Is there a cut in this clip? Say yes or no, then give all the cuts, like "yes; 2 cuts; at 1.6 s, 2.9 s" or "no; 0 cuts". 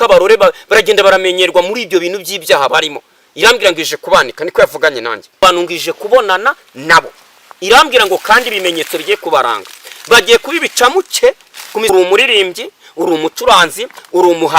yes; 2 cuts; at 5.4 s, 11.9 s